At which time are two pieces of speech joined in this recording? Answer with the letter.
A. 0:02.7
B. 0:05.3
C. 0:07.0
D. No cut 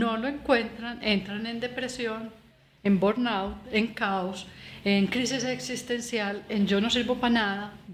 D